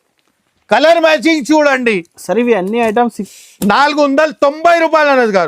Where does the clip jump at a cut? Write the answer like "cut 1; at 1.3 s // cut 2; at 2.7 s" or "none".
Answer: cut 1; at 3.2 s